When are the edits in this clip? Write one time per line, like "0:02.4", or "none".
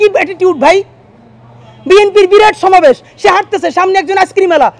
none